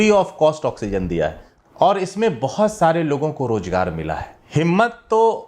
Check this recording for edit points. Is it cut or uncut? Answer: cut